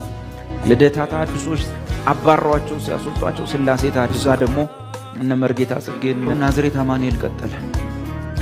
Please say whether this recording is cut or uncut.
cut